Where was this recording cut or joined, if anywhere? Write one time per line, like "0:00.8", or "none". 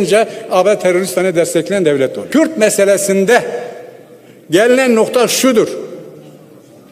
0:02.2